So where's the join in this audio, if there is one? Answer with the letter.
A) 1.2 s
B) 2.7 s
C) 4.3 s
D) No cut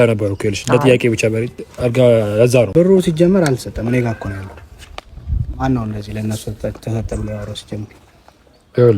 B